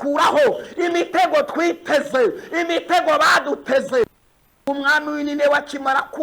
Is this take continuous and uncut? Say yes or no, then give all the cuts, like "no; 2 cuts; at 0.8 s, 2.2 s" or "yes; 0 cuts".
no; 1 cut; at 4.0 s